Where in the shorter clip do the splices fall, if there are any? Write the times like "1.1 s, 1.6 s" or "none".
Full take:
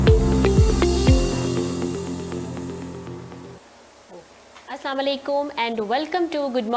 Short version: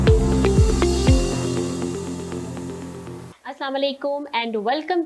3.3 s

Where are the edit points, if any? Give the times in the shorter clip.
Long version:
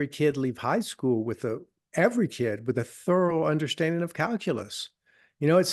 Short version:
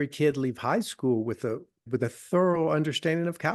1.8 s

